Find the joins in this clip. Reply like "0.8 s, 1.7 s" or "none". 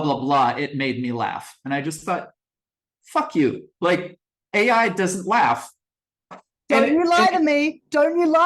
6.3 s